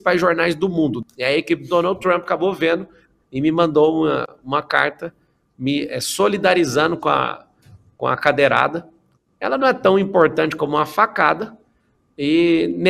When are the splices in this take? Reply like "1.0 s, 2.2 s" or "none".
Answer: 1.0 s